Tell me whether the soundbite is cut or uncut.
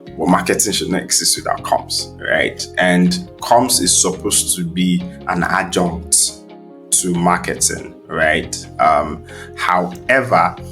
uncut